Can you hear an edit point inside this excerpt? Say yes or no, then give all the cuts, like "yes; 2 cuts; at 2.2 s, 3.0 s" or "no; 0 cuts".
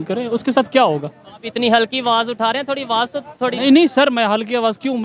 no; 0 cuts